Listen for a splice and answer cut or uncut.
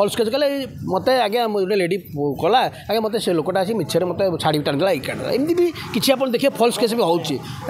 uncut